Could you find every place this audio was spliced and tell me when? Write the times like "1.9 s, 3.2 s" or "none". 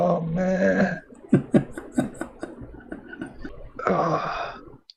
3.5 s

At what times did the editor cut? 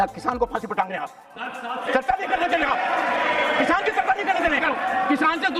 4.6 s

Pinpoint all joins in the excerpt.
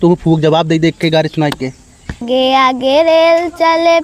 2.2 s

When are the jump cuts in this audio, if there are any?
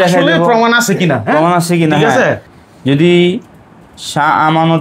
2.5 s

